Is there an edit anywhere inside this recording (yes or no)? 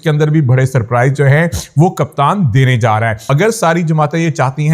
yes